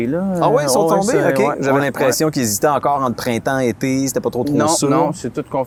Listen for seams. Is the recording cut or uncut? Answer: uncut